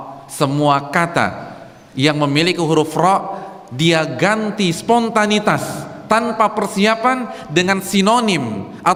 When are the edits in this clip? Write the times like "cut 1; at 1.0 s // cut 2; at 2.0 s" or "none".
none